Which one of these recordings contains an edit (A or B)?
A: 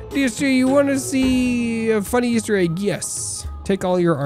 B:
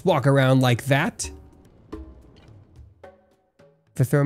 B